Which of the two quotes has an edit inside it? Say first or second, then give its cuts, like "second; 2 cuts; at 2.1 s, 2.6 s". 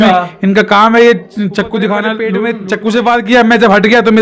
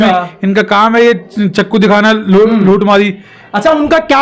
first; 1 cut; at 2.4 s